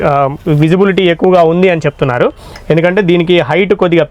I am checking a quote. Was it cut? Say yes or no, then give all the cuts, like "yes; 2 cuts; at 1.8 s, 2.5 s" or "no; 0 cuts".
no; 0 cuts